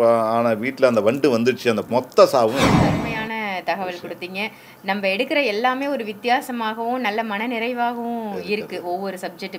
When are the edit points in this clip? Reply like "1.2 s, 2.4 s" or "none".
1.8 s, 3.0 s